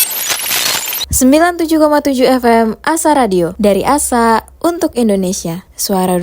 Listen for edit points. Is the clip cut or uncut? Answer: cut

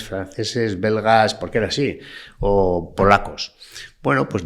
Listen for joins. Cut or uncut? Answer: uncut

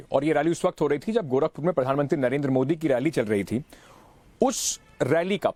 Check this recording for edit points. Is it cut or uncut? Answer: uncut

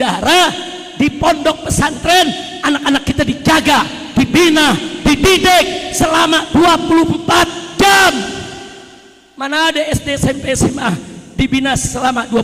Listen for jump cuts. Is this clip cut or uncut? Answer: uncut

